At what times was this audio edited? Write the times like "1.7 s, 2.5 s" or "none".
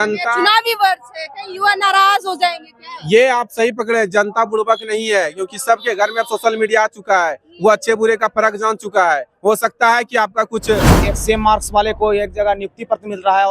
11.1 s